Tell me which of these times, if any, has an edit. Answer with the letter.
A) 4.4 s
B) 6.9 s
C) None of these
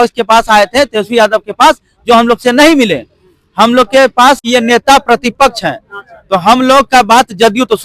A